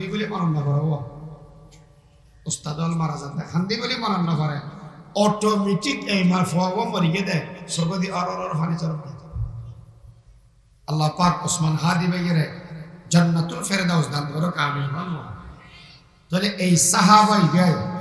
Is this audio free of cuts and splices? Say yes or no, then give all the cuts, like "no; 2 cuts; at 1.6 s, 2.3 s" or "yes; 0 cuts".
yes; 0 cuts